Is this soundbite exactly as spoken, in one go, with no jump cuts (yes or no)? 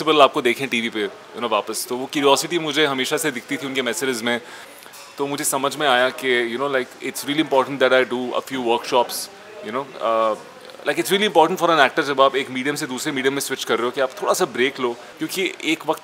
no